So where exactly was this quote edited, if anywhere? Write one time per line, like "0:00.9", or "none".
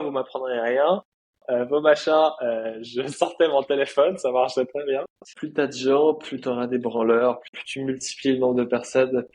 0:05.2
0:07.5